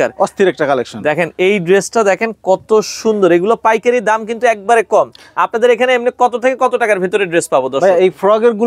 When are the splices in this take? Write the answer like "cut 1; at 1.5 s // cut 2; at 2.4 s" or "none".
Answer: none